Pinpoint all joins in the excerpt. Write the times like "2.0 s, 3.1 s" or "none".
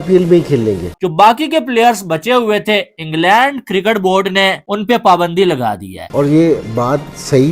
0.9 s, 6.0 s